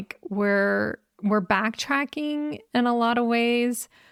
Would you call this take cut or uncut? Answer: uncut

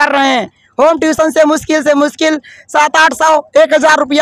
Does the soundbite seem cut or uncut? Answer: uncut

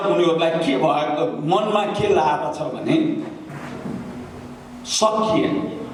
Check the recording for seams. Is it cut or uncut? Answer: uncut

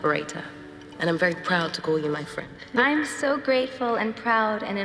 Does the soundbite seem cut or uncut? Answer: cut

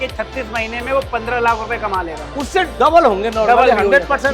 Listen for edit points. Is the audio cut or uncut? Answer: uncut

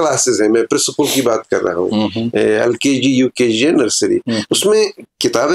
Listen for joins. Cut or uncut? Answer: uncut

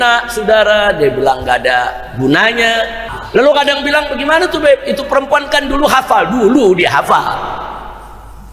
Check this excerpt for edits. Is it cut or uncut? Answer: cut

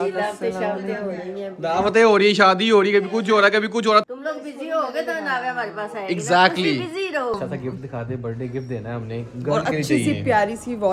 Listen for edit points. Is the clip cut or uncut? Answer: cut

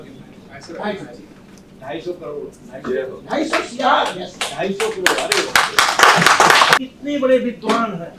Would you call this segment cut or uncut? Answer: cut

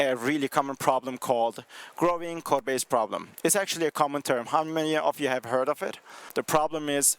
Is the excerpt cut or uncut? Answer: cut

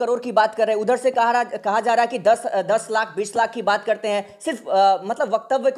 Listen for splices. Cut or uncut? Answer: uncut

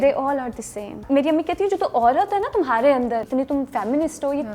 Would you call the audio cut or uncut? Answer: cut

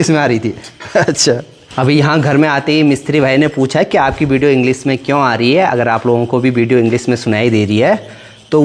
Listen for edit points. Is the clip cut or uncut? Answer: uncut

